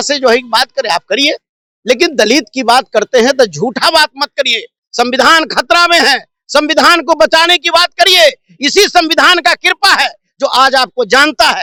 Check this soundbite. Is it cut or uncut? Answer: uncut